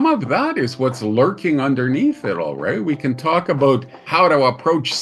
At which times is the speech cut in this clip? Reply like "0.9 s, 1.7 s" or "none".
4.0 s